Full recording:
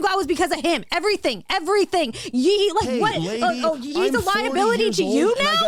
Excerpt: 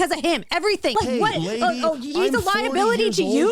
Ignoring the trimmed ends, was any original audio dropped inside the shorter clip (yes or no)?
yes